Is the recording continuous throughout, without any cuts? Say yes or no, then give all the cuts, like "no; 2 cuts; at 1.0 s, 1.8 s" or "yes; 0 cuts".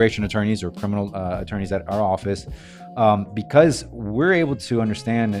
yes; 0 cuts